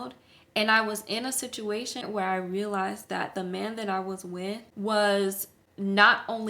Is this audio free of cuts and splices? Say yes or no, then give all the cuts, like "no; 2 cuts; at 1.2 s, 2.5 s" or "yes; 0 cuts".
no; 2 cuts; at 2.0 s, 4.7 s